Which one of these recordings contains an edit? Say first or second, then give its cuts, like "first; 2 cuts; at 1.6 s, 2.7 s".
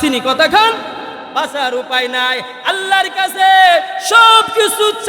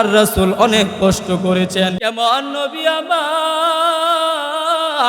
second; 1 cut; at 2.0 s